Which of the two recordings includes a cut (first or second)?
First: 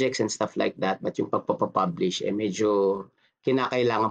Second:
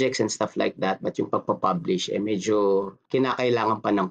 second